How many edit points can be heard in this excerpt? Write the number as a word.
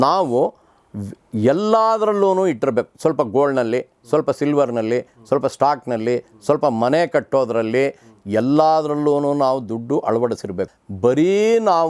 one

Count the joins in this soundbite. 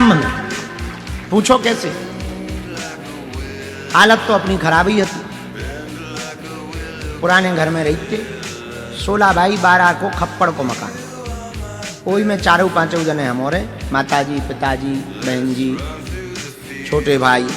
four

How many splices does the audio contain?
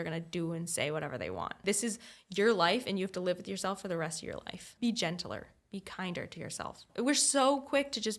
three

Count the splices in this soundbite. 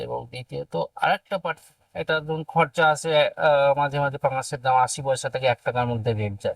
one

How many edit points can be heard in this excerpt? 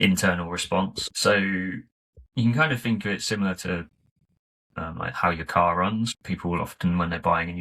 two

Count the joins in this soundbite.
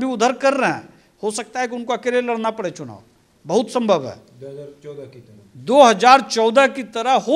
zero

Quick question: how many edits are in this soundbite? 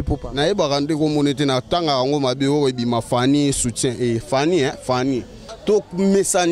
one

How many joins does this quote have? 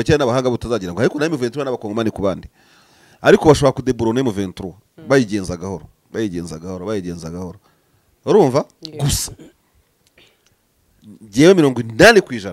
zero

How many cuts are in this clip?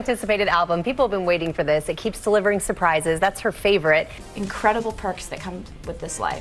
one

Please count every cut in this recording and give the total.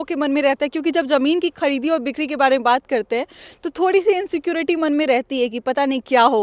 zero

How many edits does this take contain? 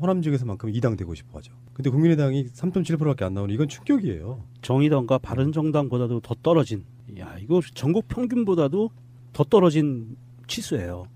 zero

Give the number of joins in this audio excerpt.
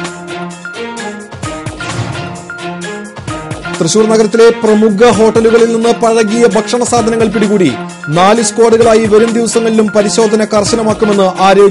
one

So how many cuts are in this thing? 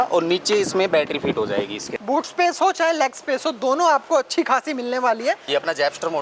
two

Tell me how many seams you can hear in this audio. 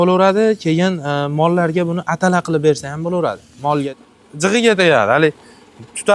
one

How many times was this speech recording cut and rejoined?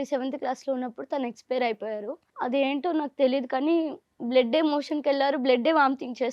one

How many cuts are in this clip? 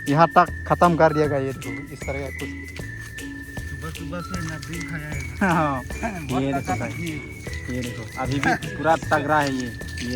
zero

